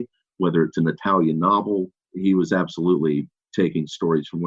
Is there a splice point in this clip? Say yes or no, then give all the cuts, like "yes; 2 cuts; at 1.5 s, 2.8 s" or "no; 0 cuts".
yes; 1 cut; at 2.0 s